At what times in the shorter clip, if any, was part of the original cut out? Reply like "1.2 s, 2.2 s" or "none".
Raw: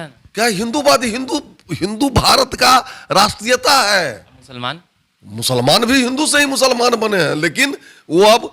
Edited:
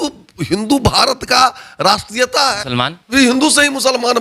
3.1 s